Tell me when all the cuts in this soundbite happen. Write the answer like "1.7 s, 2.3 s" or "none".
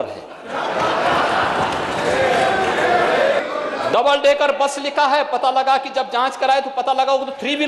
3.4 s